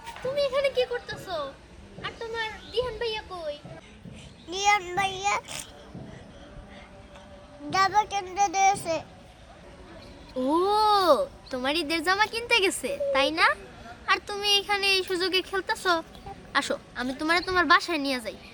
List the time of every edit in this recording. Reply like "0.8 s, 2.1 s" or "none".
none

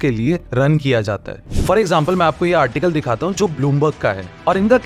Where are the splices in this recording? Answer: 1.3 s

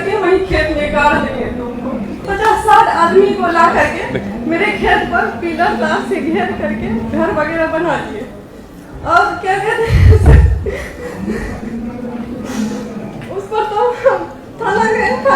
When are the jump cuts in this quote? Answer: 2.2 s

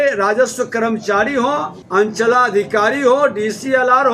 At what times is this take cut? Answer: 1.8 s

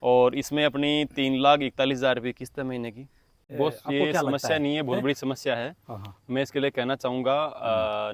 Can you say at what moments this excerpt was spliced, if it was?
3.4 s

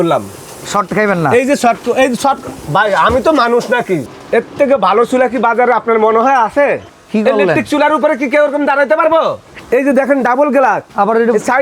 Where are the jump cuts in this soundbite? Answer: 4.1 s, 6.9 s, 9.5 s

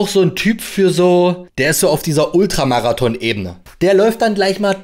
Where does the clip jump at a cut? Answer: 1.5 s, 3.6 s

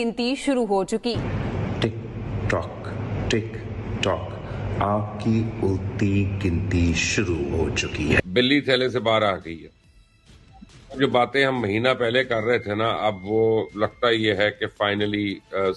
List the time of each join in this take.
none

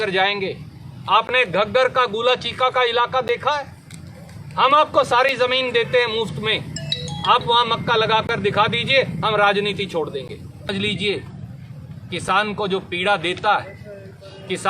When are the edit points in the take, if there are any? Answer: 10.7 s

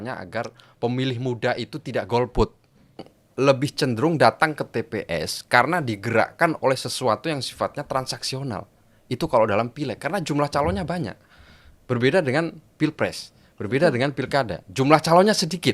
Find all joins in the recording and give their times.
3.2 s

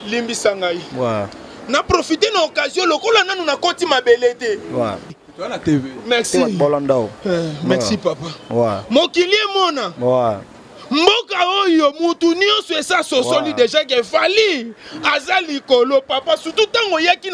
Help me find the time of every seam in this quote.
5.1 s

